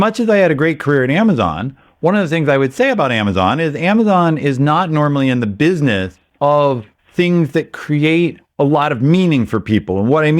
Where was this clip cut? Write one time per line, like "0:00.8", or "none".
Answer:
0:06.2
0:07.0
0:08.4